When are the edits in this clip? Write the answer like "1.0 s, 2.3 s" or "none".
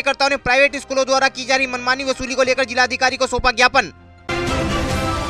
none